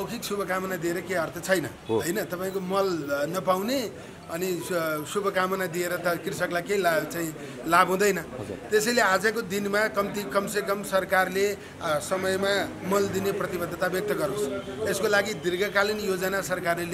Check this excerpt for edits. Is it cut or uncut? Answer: uncut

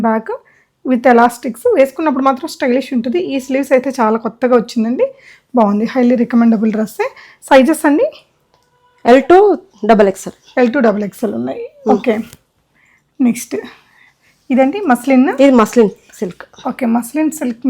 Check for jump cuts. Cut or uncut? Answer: uncut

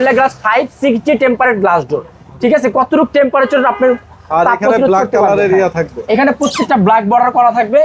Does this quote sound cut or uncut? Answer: uncut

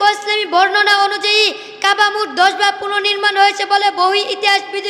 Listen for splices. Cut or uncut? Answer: uncut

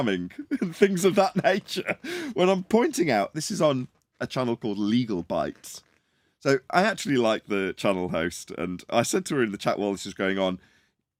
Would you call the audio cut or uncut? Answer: uncut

